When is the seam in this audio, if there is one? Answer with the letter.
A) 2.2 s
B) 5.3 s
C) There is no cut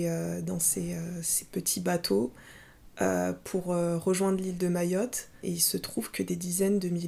B